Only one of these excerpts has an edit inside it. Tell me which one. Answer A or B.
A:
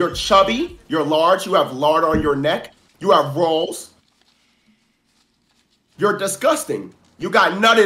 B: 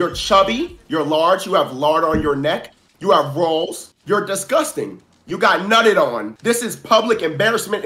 B